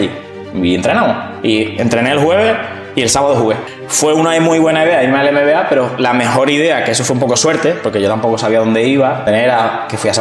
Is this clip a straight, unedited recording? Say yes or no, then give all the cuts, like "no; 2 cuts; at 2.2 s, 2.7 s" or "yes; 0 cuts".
no; 2 cuts; at 3.6 s, 9.2 s